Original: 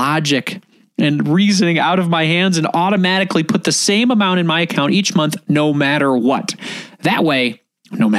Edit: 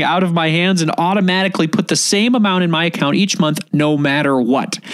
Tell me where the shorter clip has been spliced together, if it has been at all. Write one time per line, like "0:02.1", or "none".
none